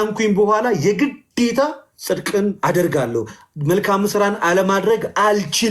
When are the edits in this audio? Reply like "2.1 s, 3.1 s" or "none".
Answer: none